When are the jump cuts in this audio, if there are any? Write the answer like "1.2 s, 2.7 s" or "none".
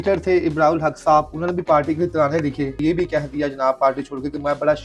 2.8 s